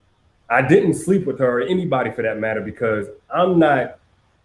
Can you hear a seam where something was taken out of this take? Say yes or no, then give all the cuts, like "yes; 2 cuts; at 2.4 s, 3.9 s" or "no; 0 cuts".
yes; 1 cut; at 1.8 s